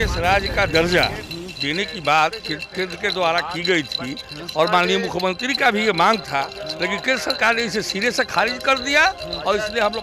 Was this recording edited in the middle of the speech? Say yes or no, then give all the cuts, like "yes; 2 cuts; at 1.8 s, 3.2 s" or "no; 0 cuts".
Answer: no; 0 cuts